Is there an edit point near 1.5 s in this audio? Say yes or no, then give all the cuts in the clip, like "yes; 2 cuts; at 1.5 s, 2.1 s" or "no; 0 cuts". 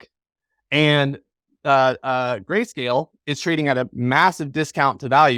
no; 0 cuts